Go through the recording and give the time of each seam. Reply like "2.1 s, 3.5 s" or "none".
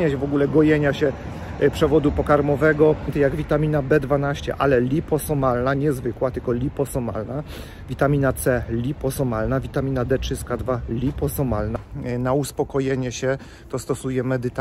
3.1 s, 11.8 s